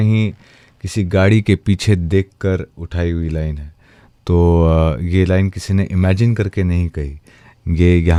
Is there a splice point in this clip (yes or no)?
no